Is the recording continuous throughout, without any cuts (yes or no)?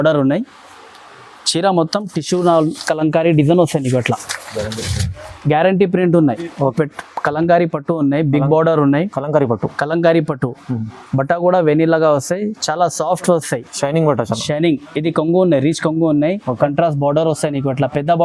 no